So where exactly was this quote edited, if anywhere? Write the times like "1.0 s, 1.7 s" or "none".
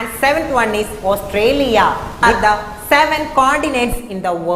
2.2 s

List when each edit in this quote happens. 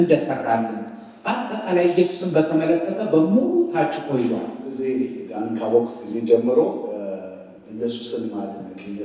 4.9 s

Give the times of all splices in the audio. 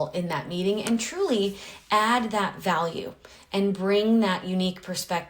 none

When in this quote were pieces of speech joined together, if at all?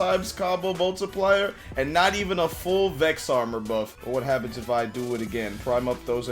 3.9 s

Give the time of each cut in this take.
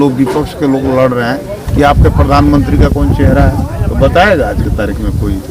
none

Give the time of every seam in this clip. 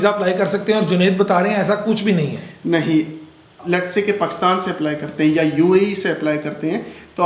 3.5 s

